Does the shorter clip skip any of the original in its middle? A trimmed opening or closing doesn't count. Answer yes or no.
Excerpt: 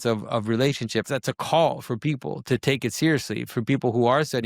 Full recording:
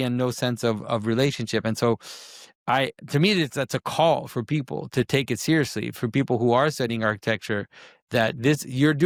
yes